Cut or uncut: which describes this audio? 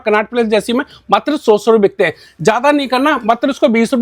uncut